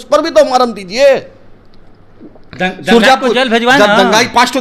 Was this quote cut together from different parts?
no; 0 cuts

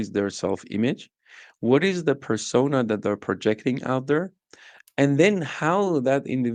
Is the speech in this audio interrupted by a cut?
no; 0 cuts

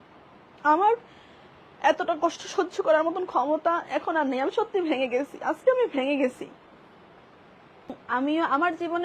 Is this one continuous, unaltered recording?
no; 1 cut; at 8.0 s

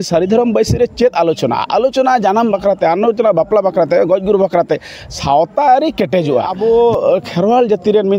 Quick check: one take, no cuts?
no; 1 cut; at 6.5 s

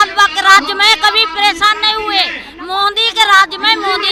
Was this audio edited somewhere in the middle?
no; 0 cuts

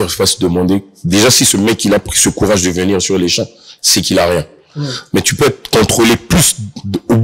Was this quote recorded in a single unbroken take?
yes; 0 cuts

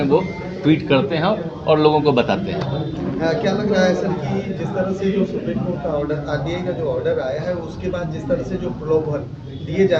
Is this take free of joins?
yes; 0 cuts

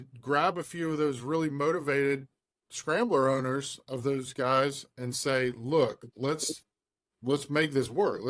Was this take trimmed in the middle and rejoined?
no; 0 cuts

